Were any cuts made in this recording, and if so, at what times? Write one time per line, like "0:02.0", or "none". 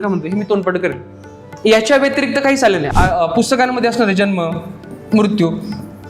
0:02.9